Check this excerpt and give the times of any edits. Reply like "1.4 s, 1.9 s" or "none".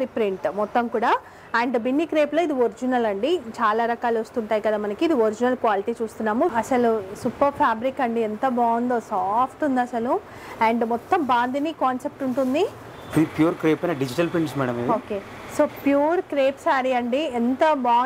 6.5 s, 13.0 s